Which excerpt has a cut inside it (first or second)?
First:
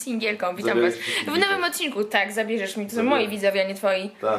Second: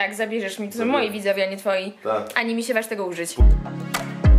second